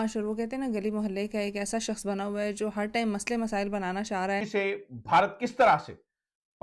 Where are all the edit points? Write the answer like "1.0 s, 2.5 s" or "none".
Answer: 4.5 s